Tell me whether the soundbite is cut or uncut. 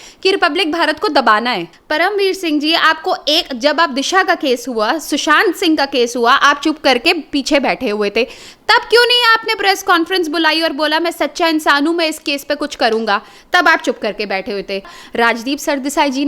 cut